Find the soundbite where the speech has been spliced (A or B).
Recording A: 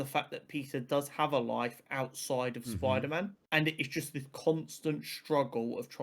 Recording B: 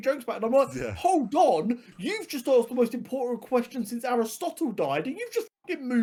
A